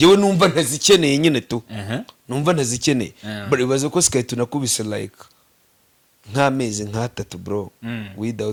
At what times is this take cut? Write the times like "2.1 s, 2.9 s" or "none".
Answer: none

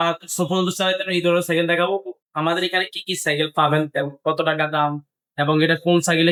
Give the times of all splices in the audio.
none

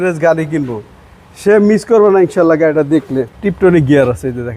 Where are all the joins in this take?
3.3 s

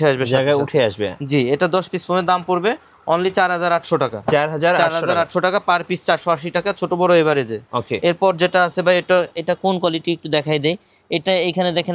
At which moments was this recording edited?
none

